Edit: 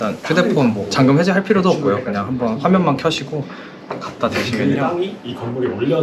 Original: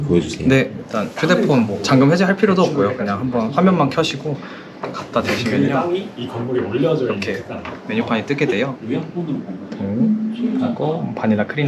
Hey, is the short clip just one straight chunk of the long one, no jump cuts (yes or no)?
yes